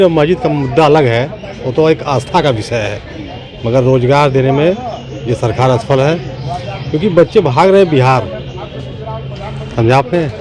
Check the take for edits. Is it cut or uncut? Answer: uncut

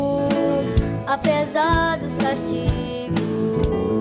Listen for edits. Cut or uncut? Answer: uncut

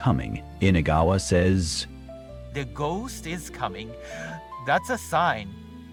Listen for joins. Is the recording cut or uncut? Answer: uncut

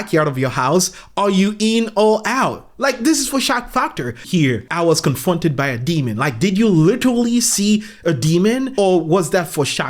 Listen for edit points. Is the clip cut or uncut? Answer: cut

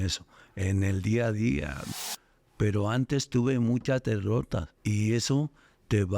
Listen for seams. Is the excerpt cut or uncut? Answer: cut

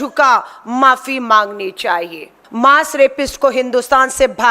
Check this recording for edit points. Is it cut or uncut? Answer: cut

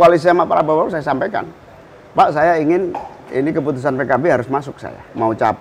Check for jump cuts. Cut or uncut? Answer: uncut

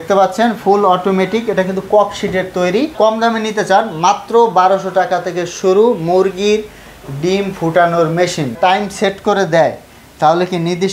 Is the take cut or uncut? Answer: cut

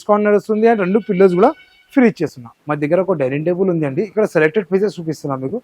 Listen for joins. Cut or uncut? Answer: uncut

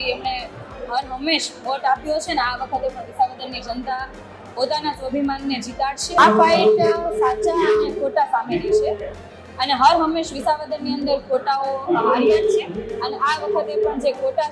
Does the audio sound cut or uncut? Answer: cut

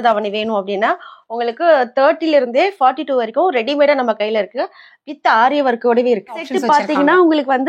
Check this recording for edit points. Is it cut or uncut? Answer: cut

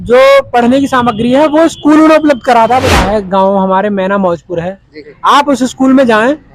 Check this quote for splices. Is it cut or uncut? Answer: cut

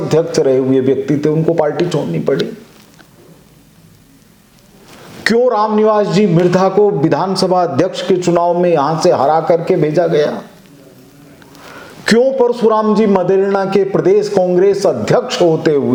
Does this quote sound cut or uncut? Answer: uncut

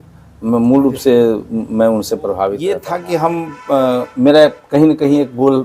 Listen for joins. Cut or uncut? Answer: cut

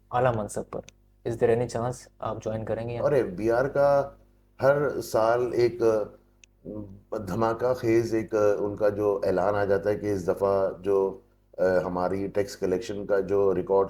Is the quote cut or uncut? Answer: cut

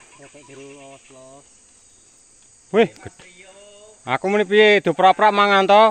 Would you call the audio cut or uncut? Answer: uncut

